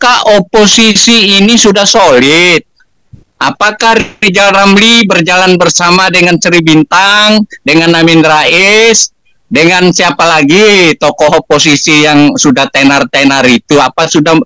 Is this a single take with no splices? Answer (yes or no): yes